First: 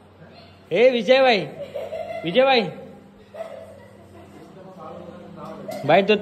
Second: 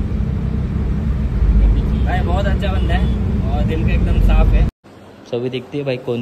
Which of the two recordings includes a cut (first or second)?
second